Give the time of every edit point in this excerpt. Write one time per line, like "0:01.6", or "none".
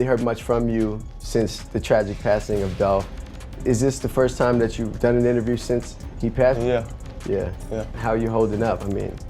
0:08.0